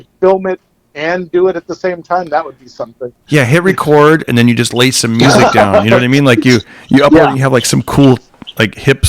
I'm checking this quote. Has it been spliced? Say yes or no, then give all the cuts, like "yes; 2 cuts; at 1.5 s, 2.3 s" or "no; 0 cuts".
yes; 1 cut; at 4.3 s